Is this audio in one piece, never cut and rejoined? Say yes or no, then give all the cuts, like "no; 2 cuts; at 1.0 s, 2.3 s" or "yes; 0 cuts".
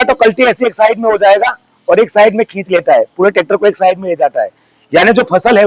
yes; 0 cuts